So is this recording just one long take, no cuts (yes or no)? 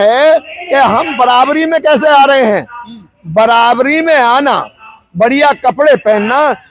yes